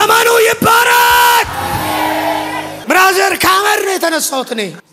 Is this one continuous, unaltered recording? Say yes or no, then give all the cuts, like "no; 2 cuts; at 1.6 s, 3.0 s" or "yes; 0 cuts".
yes; 0 cuts